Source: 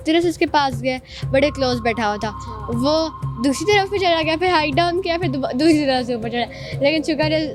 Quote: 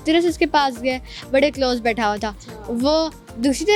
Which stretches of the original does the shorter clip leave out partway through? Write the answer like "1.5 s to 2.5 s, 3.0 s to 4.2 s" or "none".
none